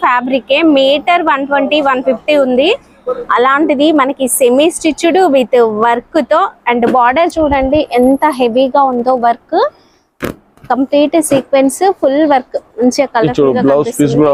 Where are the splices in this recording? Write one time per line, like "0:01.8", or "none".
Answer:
none